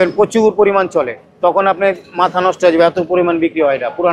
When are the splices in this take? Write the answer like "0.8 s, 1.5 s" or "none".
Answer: none

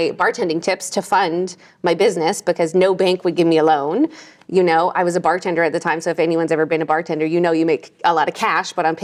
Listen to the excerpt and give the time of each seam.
none

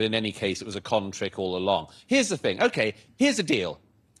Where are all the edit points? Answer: 1.9 s

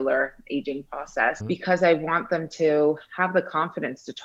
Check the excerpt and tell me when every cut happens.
1.4 s

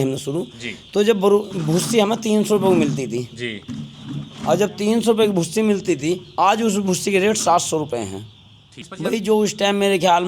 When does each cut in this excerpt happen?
8.9 s

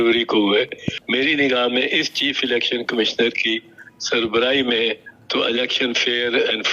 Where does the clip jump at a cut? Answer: 0.9 s

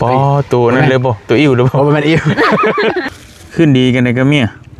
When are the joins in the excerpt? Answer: 3.0 s

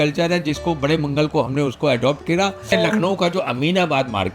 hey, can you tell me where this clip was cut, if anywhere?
2.7 s

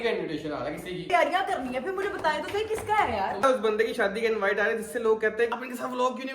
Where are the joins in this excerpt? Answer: 1.1 s, 3.4 s, 5.5 s

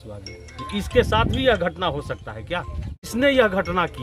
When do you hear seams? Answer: 3.1 s

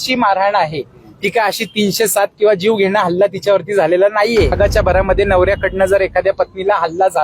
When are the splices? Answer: 4.5 s

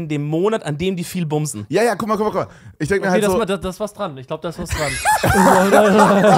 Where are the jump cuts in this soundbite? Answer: none

